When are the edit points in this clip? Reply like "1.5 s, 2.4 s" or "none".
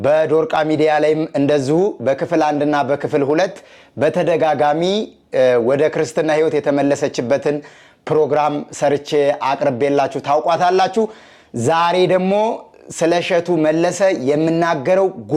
none